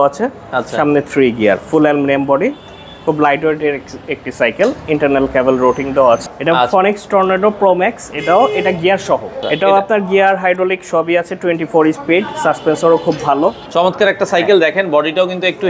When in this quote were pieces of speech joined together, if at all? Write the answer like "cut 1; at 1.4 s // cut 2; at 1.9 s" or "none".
cut 1; at 6.2 s // cut 2; at 9.4 s // cut 3; at 13.6 s